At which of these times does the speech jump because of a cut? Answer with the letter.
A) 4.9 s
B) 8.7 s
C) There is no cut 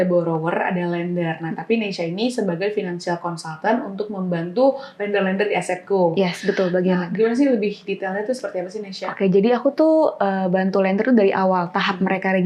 C